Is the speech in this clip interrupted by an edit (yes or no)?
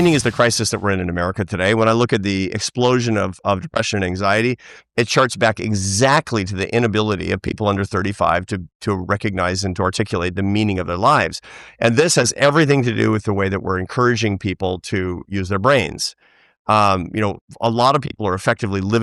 no